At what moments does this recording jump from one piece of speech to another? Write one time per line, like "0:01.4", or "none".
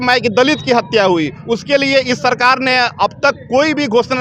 none